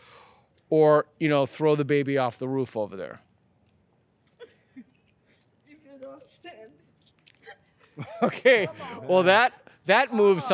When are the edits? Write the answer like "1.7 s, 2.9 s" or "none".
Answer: none